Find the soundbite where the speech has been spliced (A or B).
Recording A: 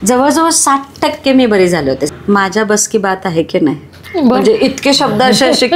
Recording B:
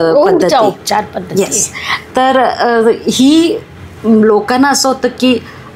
A